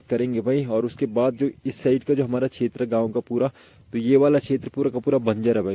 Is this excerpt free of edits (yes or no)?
yes